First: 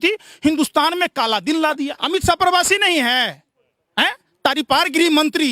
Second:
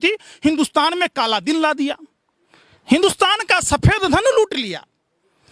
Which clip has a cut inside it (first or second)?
first